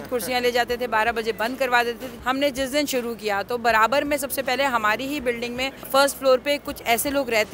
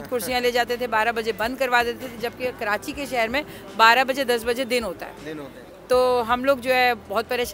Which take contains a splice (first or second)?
first